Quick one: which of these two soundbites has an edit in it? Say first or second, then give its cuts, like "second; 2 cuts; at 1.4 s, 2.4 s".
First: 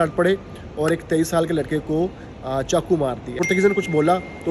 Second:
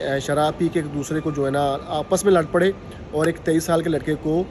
first; 1 cut; at 3.4 s